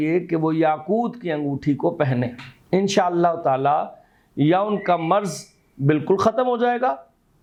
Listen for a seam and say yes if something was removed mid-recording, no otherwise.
no